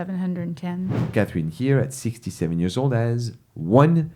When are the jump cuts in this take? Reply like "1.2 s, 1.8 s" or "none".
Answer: 1.0 s